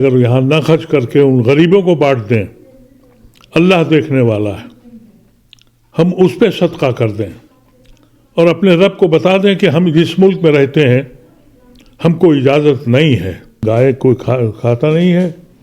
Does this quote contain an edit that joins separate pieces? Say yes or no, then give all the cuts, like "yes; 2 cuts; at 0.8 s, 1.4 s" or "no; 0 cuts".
yes; 1 cut; at 13.5 s